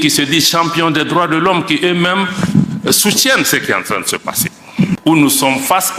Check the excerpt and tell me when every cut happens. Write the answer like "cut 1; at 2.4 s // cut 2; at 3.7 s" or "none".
cut 1; at 5.0 s